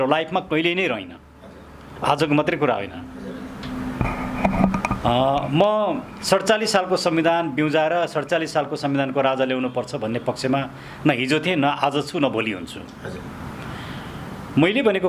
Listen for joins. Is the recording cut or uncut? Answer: uncut